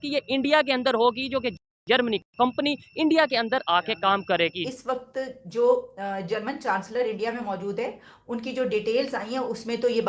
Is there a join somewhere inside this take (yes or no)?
yes